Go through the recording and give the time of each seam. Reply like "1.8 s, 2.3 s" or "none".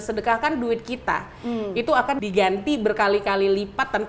2.2 s